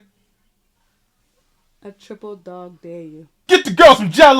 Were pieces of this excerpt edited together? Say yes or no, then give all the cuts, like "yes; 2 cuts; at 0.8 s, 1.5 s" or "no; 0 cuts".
yes; 1 cut; at 3.3 s